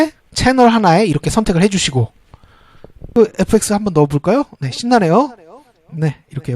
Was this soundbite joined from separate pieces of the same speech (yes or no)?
yes